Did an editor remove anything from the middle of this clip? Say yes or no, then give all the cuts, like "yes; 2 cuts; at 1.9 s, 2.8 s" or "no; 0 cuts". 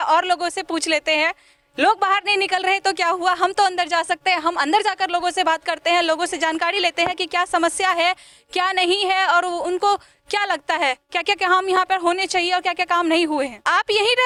no; 0 cuts